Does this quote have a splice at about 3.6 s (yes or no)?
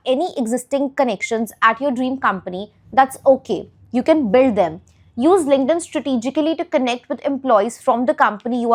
no